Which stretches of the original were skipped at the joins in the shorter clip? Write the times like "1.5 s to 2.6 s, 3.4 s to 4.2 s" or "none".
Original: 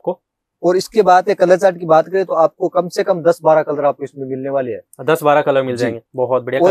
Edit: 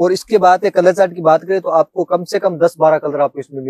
none